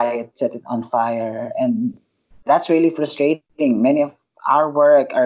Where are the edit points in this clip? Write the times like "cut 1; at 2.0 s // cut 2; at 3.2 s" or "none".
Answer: none